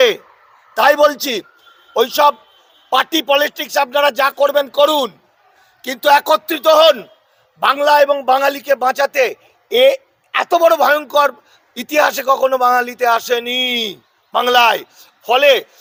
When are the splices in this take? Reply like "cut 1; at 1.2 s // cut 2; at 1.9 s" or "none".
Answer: none